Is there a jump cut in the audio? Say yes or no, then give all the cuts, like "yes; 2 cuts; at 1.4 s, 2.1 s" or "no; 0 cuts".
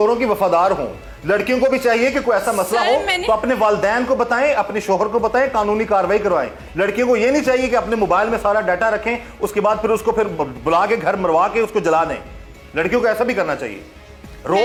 no; 0 cuts